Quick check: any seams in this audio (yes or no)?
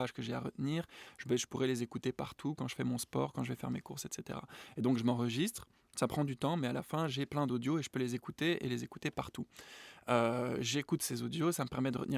no